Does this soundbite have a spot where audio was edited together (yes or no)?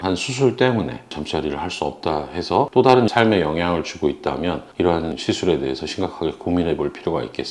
yes